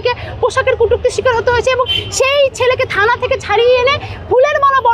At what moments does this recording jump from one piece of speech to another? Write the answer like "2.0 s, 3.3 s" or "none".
none